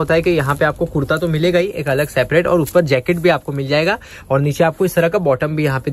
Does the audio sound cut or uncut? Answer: uncut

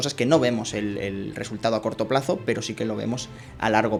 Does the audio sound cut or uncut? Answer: uncut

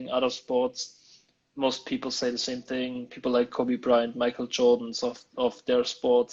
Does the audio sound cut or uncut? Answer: uncut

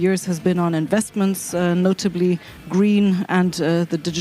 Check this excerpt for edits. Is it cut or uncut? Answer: cut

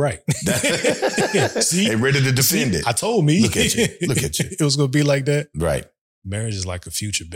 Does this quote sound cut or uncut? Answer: cut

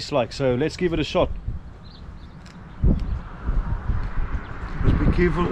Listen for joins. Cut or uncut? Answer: uncut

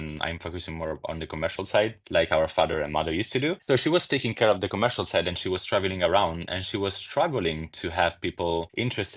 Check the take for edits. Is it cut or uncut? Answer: uncut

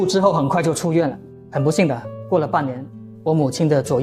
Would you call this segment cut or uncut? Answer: cut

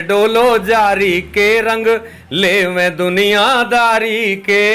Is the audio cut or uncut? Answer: uncut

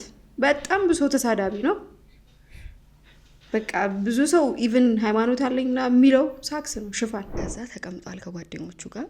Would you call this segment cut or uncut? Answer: cut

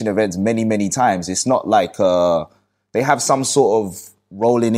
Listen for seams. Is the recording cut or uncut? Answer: uncut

